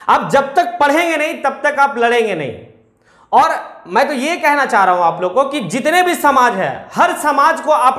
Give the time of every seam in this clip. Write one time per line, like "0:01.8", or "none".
none